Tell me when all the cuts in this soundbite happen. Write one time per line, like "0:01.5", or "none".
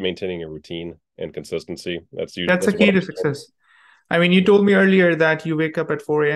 none